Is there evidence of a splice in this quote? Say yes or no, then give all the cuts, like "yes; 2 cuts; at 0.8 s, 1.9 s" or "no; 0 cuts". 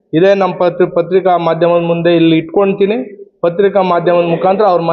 no; 0 cuts